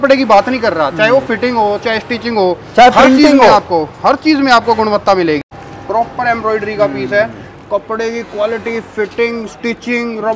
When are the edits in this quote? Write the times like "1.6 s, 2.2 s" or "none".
5.5 s